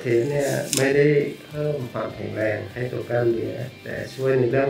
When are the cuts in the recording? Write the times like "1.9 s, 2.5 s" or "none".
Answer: none